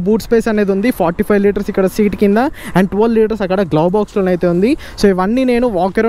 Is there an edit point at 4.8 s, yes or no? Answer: no